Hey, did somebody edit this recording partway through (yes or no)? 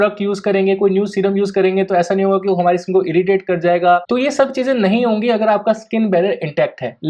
yes